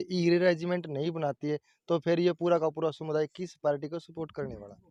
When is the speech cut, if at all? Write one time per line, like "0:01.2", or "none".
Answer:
none

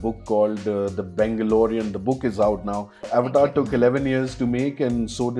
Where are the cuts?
0:03.0

